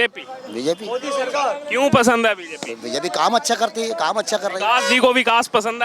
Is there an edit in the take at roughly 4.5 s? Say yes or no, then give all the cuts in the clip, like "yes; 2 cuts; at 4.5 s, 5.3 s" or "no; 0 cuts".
no; 0 cuts